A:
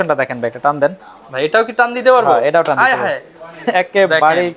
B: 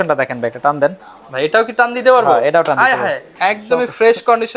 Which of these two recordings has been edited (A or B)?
B